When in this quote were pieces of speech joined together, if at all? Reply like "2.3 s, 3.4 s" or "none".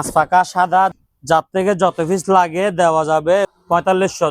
0.9 s, 3.5 s